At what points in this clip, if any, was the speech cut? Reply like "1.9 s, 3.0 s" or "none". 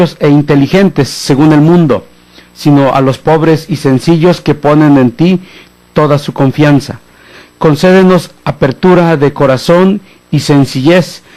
none